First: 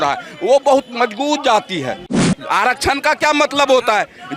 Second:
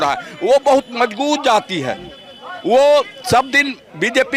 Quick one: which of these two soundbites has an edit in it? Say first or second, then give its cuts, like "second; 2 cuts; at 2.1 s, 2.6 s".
first; 1 cut; at 2.3 s